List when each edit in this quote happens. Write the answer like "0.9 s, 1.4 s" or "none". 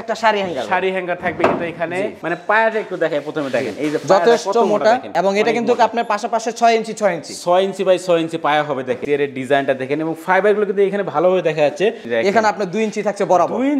2.2 s, 9.0 s, 12.1 s